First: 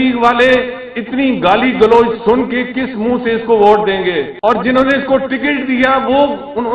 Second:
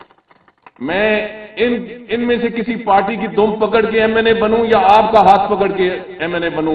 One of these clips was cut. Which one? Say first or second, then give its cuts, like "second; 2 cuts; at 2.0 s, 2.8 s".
first; 1 cut; at 4.6 s